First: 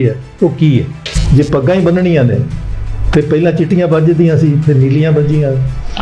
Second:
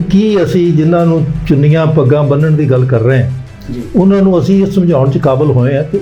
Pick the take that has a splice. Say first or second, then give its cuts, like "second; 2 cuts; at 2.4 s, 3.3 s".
first; 1 cut; at 1.1 s